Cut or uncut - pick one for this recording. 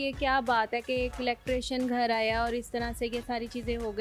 uncut